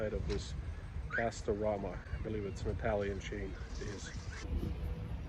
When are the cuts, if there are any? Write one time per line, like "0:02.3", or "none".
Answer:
none